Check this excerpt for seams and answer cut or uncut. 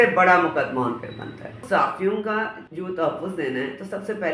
cut